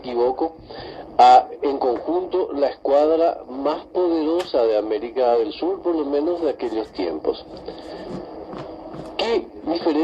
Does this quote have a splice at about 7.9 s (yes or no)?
no